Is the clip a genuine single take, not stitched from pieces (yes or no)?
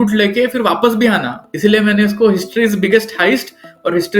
no